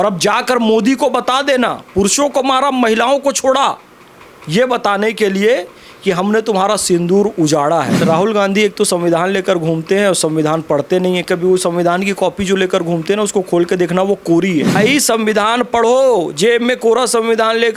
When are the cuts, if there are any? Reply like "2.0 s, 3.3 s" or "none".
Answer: 8.0 s, 14.8 s